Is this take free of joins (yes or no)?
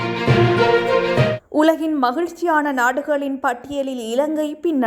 yes